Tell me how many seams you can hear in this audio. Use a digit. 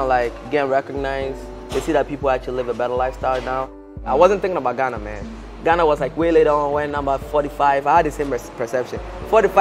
1